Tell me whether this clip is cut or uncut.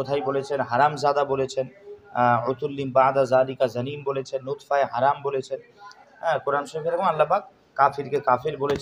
uncut